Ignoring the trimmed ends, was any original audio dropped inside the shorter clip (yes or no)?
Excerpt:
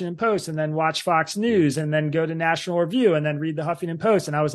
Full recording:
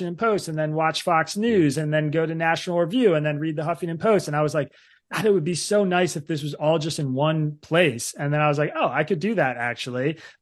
no